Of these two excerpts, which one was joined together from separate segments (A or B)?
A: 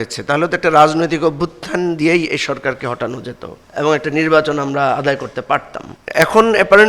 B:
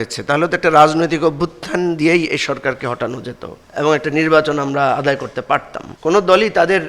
B